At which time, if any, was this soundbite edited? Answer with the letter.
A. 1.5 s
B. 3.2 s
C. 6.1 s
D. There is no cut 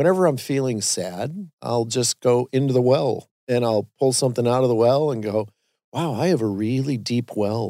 A